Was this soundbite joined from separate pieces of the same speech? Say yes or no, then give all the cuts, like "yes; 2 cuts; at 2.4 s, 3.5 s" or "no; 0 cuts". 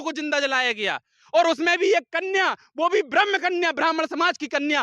no; 0 cuts